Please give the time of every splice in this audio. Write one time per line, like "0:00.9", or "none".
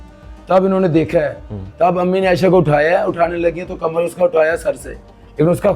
none